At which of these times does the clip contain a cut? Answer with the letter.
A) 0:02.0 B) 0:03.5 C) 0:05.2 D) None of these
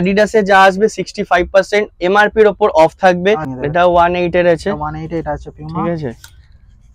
B